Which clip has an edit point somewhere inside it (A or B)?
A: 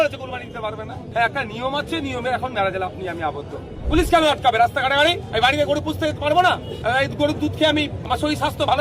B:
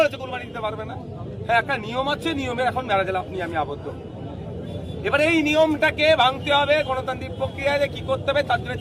A